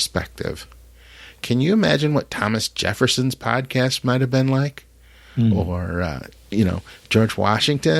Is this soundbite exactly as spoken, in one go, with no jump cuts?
yes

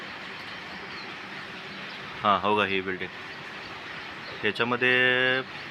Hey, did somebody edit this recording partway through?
no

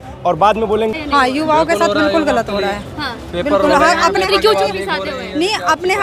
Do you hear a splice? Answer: yes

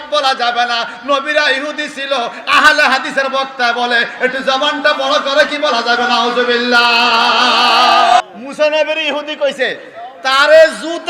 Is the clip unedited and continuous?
no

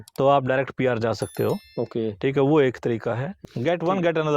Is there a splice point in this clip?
yes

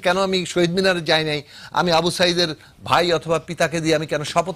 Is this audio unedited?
yes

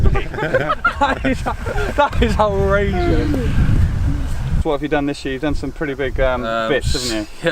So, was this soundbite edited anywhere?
yes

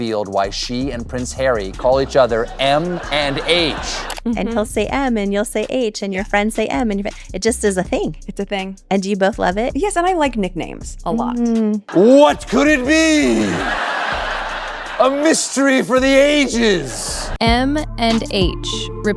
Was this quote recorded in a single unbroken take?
yes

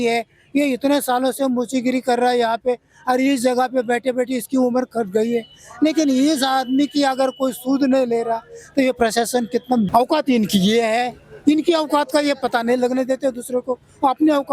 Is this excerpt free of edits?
no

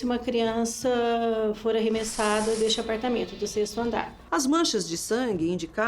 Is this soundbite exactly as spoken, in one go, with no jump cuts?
no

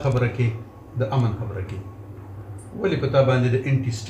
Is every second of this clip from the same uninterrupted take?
yes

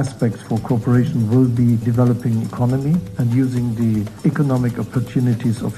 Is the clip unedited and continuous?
no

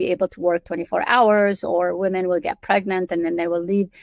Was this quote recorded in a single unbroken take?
yes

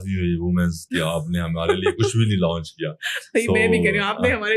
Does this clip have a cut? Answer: no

